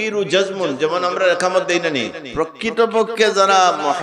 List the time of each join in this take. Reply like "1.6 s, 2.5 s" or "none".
2.2 s